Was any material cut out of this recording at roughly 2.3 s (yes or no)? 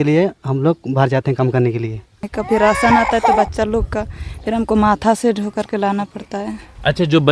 yes